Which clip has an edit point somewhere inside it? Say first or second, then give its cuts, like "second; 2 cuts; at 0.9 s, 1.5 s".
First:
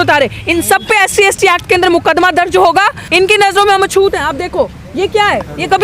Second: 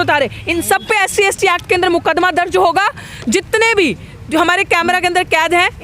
first; 1 cut; at 3.0 s